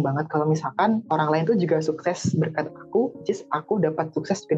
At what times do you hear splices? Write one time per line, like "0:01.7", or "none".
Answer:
0:01.0